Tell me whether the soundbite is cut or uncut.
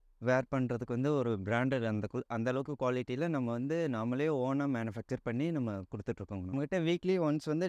cut